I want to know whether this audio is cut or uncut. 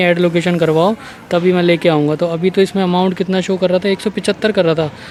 uncut